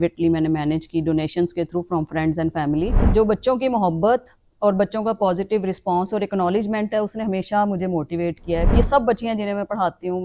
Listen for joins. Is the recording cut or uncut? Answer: cut